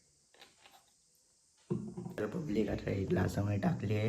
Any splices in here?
yes; 1 cut; at 2.0 s

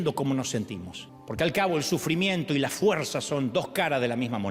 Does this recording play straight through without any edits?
yes; 0 cuts

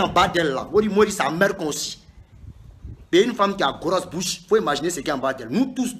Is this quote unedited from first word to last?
yes; 0 cuts

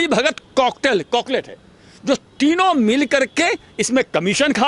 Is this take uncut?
yes; 0 cuts

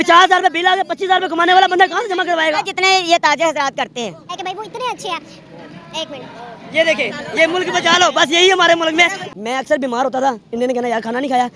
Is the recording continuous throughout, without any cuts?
no; 2 cuts; at 4.3 s, 9.2 s

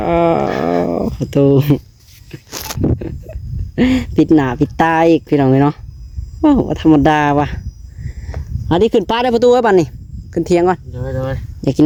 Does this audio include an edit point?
no; 0 cuts

